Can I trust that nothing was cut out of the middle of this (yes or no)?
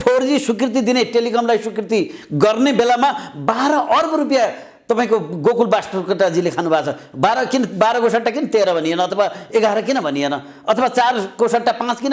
yes